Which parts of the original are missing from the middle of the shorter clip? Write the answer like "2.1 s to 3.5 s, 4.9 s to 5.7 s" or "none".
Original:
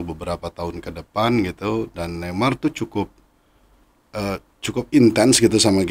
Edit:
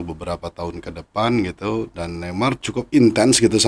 2.6 s to 4.6 s